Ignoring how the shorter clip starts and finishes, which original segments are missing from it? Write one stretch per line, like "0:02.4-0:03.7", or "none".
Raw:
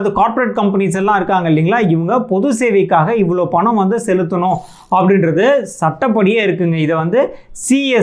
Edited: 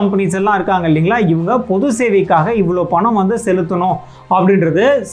none